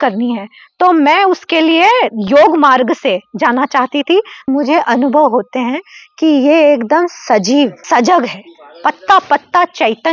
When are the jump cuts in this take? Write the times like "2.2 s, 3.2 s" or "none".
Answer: 4.5 s, 7.8 s